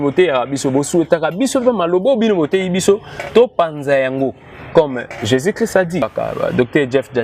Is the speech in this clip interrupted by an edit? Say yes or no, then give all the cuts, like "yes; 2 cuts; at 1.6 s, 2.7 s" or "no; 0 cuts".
yes; 1 cut; at 6.1 s